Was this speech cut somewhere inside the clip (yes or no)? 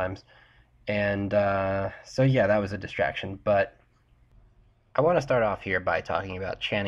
yes